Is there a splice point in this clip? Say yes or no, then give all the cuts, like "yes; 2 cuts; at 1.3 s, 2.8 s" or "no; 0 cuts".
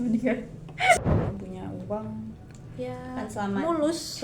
yes; 1 cut; at 1.0 s